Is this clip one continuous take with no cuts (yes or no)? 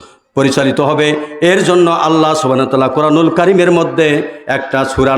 yes